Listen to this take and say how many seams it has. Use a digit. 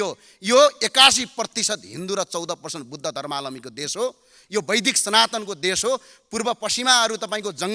0